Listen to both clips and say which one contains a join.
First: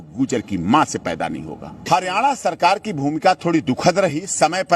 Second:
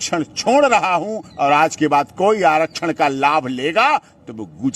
first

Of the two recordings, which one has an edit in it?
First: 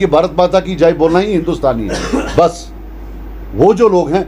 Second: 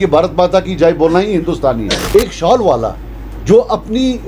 second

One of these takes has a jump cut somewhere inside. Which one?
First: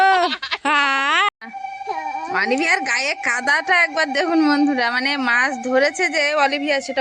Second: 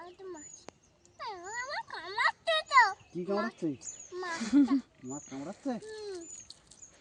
first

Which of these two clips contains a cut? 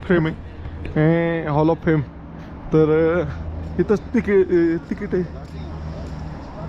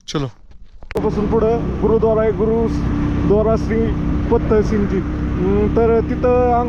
second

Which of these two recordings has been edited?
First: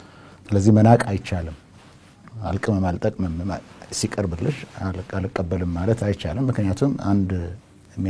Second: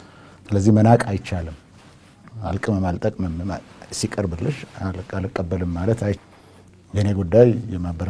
second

